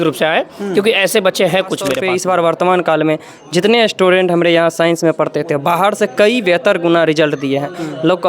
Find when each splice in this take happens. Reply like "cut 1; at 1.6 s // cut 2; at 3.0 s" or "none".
cut 1; at 2.0 s